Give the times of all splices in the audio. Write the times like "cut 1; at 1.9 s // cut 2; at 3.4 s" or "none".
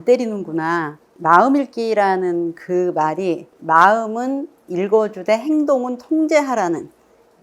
cut 1; at 1.0 s // cut 2; at 3.5 s